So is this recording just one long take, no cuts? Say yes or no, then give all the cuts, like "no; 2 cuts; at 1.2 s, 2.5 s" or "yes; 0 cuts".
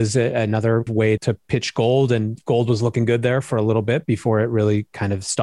no; 1 cut; at 1.1 s